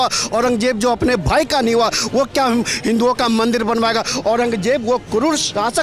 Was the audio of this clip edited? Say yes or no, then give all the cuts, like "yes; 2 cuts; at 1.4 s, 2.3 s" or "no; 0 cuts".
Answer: no; 0 cuts